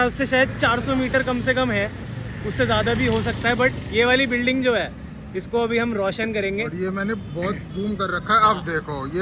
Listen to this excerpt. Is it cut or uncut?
uncut